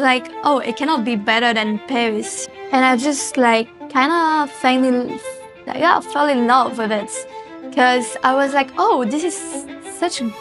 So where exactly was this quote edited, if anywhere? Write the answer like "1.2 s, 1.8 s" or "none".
2.4 s